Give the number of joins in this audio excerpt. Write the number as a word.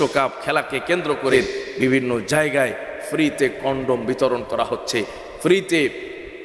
one